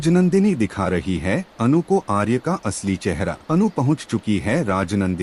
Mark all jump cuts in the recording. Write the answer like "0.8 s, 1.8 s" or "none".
3.4 s